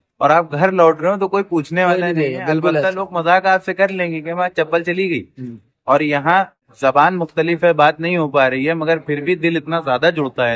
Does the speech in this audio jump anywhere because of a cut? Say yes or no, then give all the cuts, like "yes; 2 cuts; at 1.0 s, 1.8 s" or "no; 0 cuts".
yes; 1 cut; at 6.7 s